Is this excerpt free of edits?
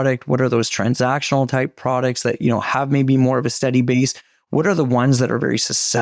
yes; 0 cuts

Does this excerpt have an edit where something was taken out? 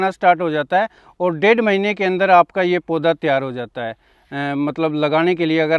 no; 0 cuts

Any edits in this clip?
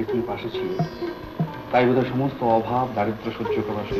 no; 0 cuts

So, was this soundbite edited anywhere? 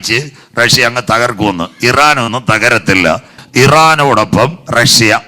yes; 1 cut; at 3.4 s

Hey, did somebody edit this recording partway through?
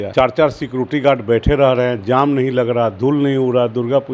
no; 0 cuts

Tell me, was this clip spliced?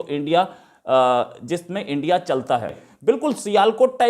yes; 1 cut; at 2.7 s

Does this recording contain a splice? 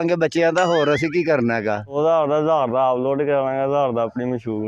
yes; 1 cut; at 1.9 s

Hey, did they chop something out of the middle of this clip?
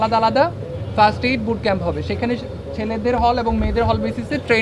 no; 0 cuts

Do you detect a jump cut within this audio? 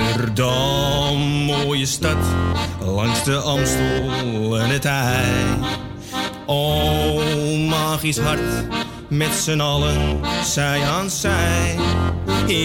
no; 0 cuts

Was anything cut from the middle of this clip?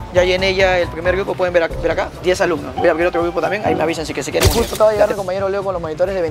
yes; 2 cuts; at 2.1 s, 4.5 s

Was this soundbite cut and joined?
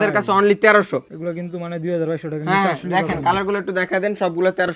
no; 0 cuts

